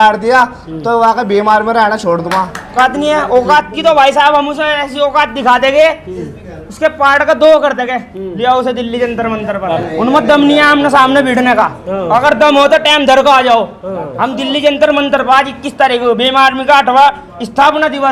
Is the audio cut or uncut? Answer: cut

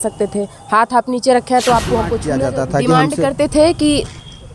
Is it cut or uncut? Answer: cut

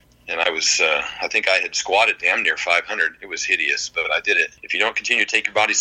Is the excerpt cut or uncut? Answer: cut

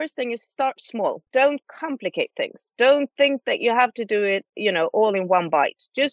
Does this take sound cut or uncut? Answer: cut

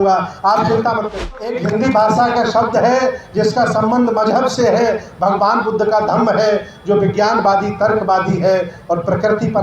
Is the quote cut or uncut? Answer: cut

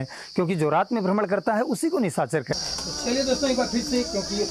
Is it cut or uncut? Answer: cut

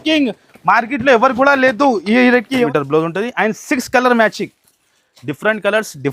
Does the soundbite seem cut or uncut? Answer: cut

